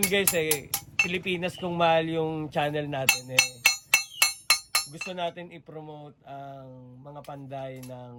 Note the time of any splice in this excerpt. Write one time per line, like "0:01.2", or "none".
none